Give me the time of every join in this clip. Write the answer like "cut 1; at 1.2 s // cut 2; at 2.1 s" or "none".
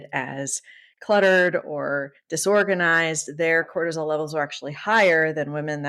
none